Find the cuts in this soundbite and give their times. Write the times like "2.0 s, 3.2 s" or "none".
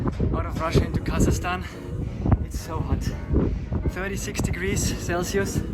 none